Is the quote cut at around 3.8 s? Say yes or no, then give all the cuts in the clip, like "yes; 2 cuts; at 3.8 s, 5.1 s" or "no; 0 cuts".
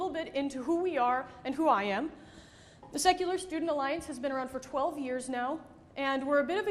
yes; 1 cut; at 3.8 s